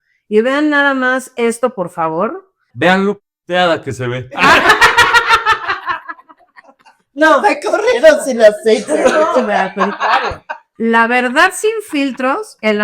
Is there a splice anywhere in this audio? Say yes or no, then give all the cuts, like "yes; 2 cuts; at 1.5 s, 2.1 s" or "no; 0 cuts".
yes; 2 cuts; at 2.6 s, 10.6 s